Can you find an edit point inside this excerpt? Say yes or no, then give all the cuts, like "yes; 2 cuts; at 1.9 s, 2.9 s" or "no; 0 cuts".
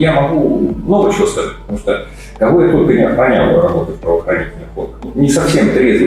yes; 1 cut; at 5.1 s